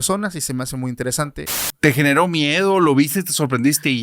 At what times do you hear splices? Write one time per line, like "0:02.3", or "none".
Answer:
0:01.6